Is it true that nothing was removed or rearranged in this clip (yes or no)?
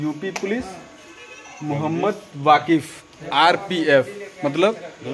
yes